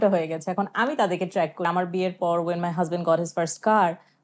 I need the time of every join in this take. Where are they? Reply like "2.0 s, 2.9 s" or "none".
1.7 s